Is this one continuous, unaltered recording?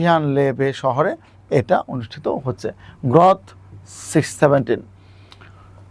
yes; 0 cuts

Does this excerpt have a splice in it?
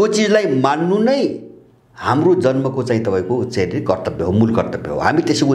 no; 0 cuts

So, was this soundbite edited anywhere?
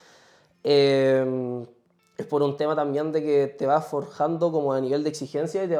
no; 0 cuts

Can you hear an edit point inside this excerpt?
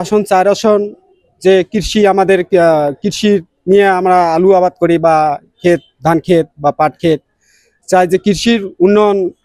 no; 0 cuts

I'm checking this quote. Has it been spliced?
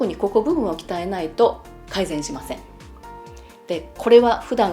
no; 0 cuts

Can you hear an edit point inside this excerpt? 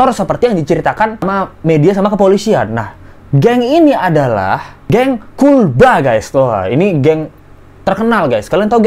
no; 0 cuts

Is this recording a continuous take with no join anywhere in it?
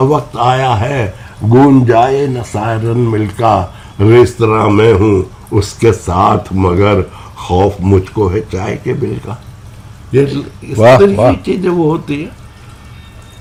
yes; 0 cuts

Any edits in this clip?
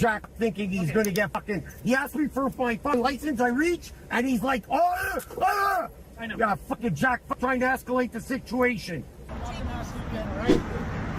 yes; 1 cut; at 9.3 s

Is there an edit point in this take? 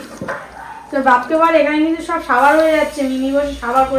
no; 0 cuts

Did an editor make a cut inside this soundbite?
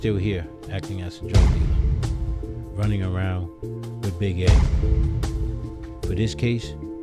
no; 0 cuts

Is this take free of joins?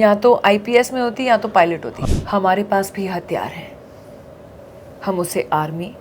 no; 1 cut; at 1.9 s

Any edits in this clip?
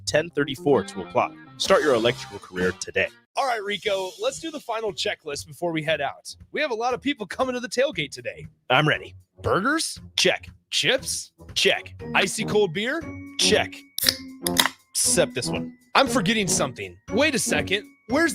yes; 1 cut; at 3.2 s

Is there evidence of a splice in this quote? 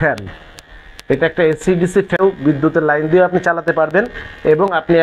yes; 1 cut; at 2.1 s

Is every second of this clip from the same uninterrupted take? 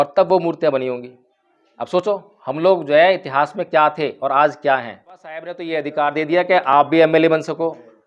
no; 1 cut; at 5.6 s

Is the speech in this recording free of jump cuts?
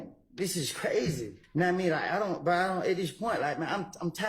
no; 1 cut; at 1.3 s

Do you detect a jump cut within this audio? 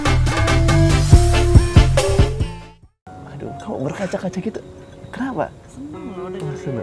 yes; 1 cut; at 3.0 s

